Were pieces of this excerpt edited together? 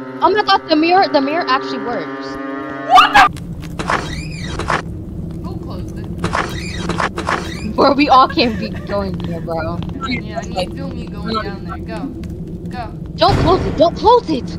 yes; 2 cuts; at 3.3 s, 9.9 s

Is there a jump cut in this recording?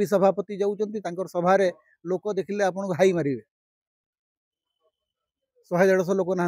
no; 0 cuts

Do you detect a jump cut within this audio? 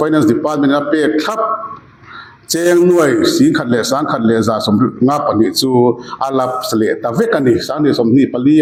no; 0 cuts

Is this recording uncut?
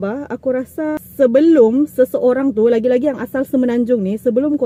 yes; 0 cuts

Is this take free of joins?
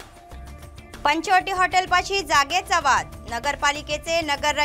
yes; 0 cuts

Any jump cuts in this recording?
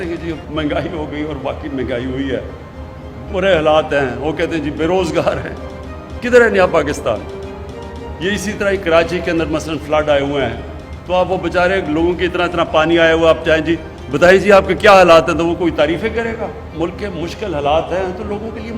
yes; 1 cut; at 16.7 s

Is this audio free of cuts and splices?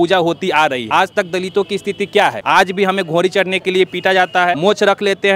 no; 3 cuts; at 0.8 s, 2.4 s, 4.6 s

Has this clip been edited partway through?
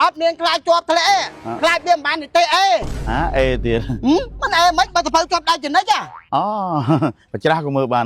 no; 0 cuts

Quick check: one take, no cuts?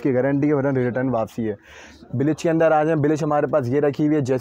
yes; 0 cuts

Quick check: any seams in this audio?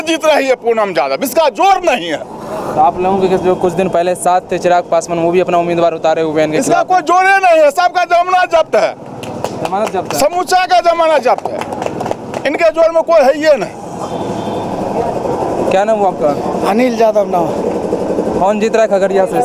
no; 0 cuts

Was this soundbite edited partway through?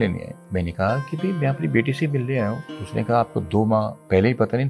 no; 0 cuts

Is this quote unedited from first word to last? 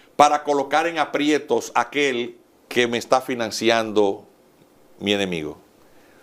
yes; 0 cuts

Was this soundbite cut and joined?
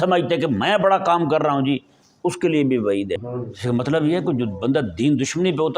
yes; 1 cut; at 3.2 s

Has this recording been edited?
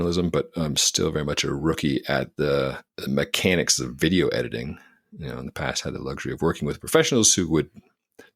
yes; 1 cut; at 2.9 s

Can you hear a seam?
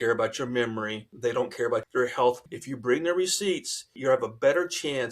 yes; 4 cuts; at 1.1 s, 1.9 s, 2.5 s, 3.9 s

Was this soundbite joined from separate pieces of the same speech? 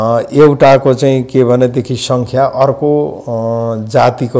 no; 0 cuts

